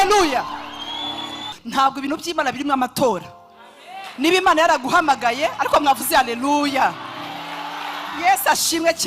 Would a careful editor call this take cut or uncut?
cut